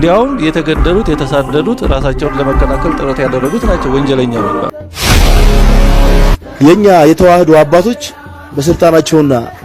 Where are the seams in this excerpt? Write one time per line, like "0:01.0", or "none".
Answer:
0:04.8